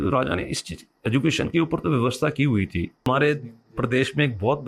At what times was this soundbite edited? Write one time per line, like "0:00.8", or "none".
0:03.0